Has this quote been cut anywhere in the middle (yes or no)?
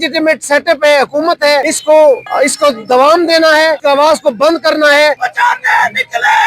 yes